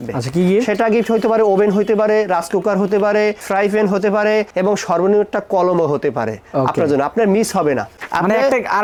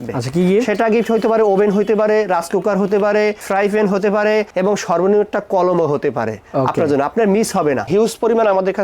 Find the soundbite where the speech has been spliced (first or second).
second